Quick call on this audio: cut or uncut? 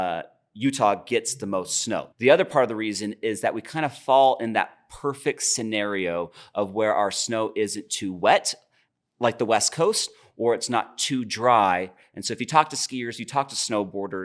cut